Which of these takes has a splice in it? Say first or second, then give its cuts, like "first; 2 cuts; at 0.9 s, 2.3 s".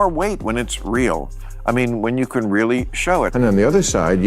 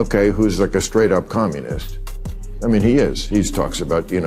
first; 1 cut; at 3.1 s